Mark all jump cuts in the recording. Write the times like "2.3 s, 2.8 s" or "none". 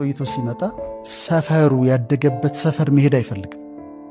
1.1 s